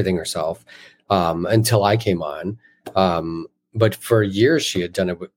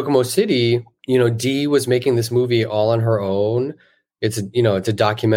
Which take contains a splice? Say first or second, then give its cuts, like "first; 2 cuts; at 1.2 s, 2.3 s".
second; 1 cut; at 0.9 s